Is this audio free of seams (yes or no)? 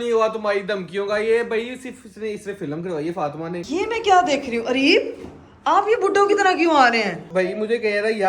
no